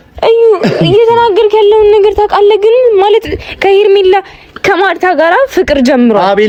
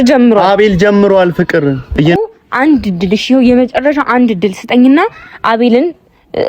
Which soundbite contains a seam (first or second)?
second